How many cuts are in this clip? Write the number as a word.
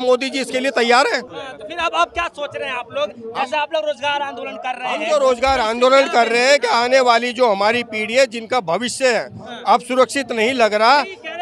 zero